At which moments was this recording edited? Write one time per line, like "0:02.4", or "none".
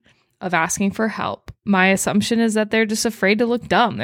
0:01.5